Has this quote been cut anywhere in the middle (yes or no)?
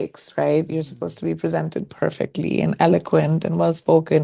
no